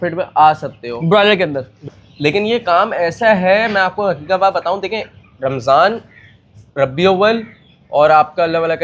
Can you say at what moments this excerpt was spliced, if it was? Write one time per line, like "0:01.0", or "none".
0:02.0